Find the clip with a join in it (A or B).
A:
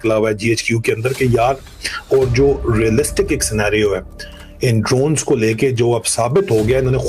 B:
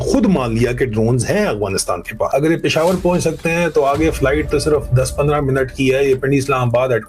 B